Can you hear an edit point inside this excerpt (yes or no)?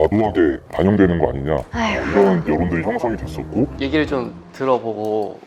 yes